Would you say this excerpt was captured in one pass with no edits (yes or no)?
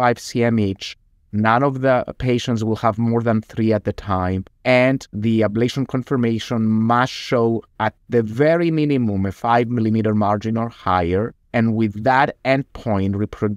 no